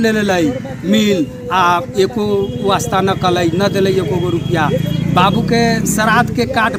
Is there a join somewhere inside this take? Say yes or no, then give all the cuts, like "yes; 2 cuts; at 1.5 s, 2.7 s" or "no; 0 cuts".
no; 0 cuts